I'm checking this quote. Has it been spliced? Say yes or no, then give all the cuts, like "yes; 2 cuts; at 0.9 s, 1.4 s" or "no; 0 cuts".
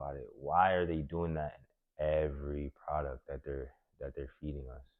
no; 0 cuts